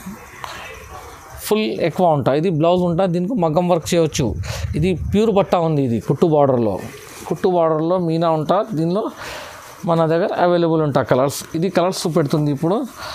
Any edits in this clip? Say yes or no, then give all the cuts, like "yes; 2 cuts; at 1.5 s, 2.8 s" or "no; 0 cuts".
no; 0 cuts